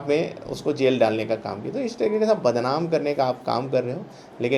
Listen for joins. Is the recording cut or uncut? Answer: uncut